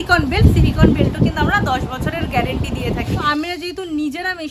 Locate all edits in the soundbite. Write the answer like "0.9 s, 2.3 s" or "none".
3.2 s